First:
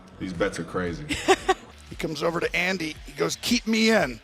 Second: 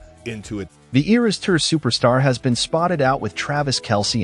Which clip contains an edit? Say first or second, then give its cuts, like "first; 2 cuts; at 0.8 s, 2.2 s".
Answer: first; 1 cut; at 1.6 s